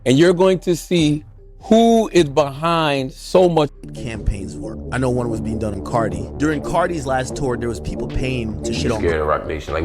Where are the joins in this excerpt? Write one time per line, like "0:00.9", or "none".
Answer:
0:03.8
0:09.0